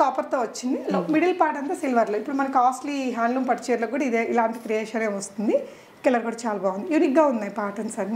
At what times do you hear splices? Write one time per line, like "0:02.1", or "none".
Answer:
none